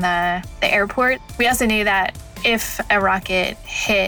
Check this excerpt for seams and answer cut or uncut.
cut